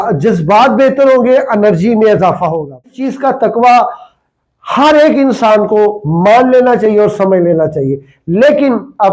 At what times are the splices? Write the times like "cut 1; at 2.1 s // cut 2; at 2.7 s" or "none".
cut 1; at 3.0 s